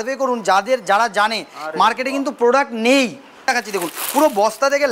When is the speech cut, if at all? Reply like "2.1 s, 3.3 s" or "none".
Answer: 3.5 s